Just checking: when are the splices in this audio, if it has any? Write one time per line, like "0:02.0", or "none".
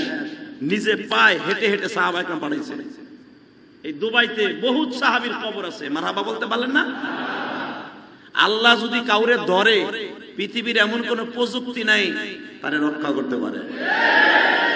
0:07.9